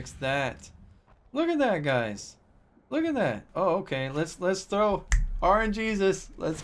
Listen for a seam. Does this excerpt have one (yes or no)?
yes